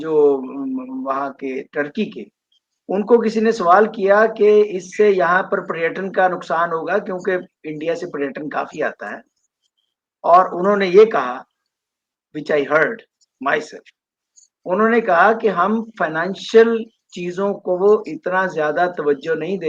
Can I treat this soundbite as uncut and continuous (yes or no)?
yes